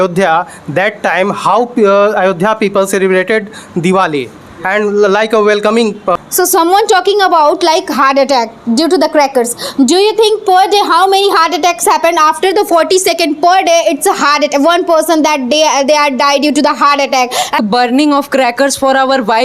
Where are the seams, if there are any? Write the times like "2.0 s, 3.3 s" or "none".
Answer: 6.2 s, 17.6 s